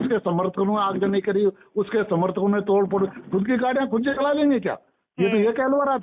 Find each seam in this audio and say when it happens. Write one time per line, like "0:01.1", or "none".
none

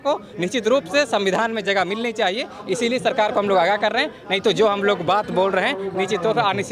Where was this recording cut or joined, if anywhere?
none

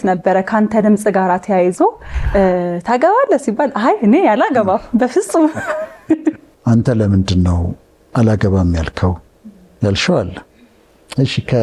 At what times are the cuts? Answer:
0:02.1
0:06.5

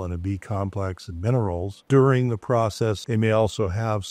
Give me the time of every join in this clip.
0:01.8
0:03.0

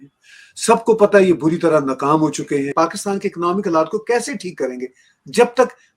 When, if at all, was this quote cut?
0:02.7

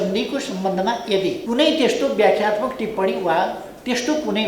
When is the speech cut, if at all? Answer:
0:01.4

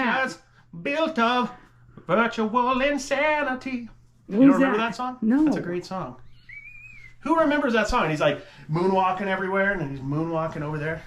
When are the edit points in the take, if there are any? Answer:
none

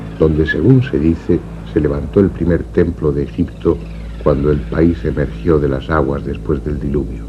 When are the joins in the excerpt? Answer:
none

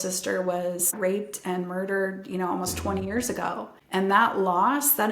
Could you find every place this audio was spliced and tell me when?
0:00.9
0:03.7

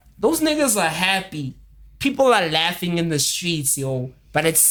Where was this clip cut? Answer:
none

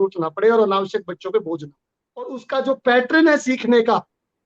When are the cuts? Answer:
0:02.4

